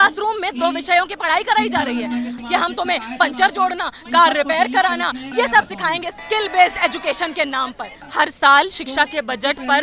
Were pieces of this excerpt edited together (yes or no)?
yes